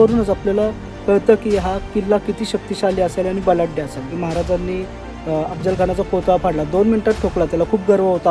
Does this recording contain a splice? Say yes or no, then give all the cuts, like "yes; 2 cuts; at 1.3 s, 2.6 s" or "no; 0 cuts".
yes; 1 cut; at 4.2 s